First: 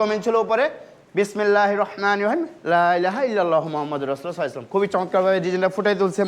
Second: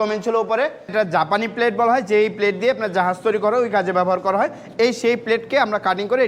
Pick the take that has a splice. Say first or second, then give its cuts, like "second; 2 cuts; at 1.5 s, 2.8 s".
second; 1 cut; at 0.9 s